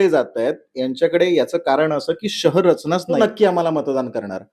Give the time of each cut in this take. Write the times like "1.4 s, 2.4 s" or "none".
3.1 s